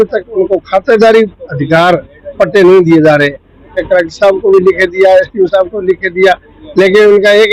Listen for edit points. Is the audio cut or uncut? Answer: uncut